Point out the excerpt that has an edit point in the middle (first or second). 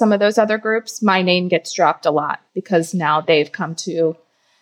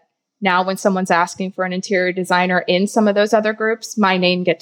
first